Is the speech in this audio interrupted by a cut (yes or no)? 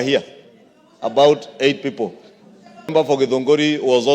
yes